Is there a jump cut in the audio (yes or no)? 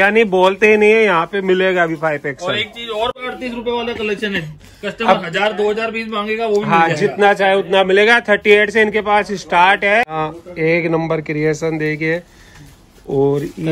yes